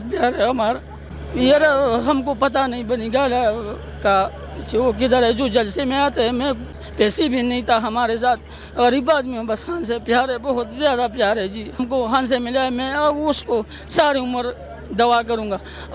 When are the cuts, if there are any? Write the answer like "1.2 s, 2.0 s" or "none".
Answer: 1.2 s, 6.6 s, 11.8 s